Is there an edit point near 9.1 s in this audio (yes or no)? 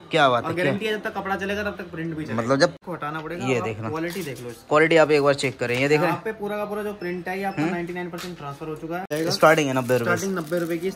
yes